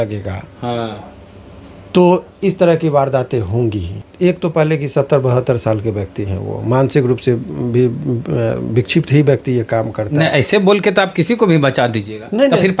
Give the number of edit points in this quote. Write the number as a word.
one